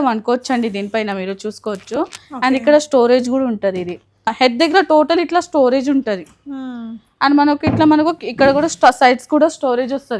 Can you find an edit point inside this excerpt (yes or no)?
yes